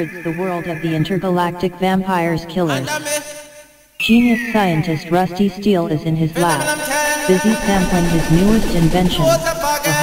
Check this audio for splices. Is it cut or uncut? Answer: uncut